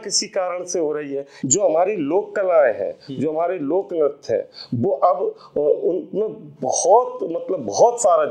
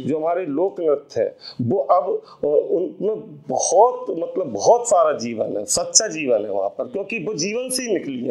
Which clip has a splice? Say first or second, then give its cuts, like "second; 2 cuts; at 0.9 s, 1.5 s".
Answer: first; 1 cut; at 1.3 s